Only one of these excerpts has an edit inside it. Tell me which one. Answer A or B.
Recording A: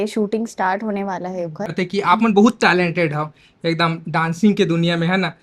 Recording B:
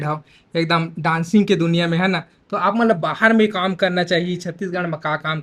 A